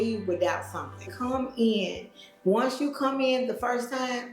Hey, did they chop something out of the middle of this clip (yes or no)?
yes